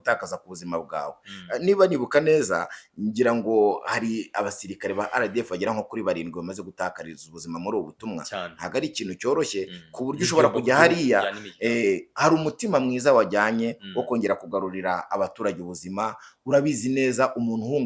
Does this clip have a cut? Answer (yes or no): no